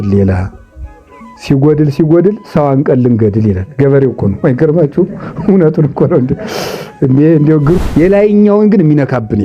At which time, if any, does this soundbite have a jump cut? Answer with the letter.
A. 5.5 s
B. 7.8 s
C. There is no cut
B